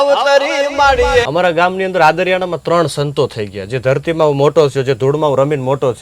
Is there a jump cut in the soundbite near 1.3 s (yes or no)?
yes